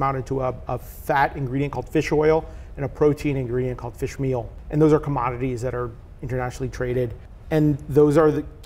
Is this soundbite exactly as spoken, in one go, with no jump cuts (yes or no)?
no